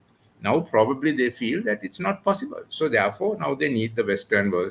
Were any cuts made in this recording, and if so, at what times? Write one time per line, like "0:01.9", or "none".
none